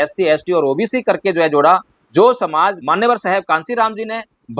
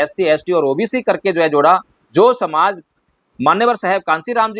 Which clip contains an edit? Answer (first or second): first